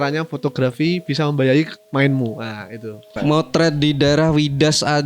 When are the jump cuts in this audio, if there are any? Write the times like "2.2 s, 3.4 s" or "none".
3.0 s